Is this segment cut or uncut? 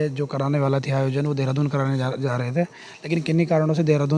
uncut